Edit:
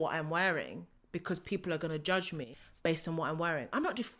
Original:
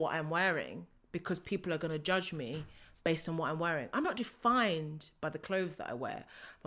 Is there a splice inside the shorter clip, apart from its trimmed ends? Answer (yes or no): yes